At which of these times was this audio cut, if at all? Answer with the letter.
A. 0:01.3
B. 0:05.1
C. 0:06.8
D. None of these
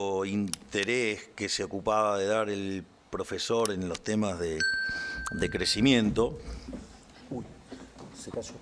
D